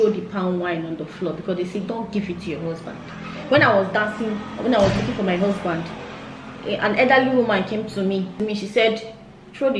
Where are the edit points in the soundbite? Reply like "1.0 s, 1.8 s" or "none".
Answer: 8.4 s